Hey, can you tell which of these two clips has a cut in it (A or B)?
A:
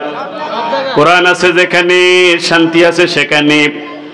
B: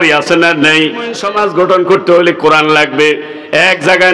B